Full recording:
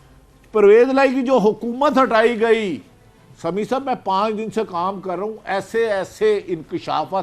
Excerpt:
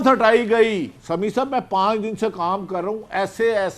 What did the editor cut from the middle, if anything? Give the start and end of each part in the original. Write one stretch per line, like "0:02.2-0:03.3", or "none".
0:02.9-0:03.3